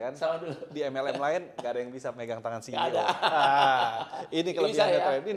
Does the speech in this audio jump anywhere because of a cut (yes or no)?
no